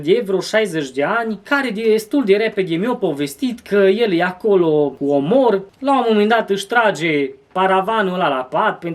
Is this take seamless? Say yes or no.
no